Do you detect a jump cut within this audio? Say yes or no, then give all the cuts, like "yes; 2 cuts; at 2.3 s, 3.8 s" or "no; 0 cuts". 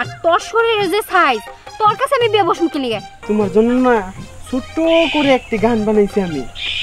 yes; 1 cut; at 3.1 s